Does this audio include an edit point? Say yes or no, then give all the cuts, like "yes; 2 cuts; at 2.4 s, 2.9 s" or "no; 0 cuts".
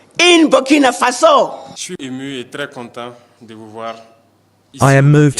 yes; 1 cut; at 1.8 s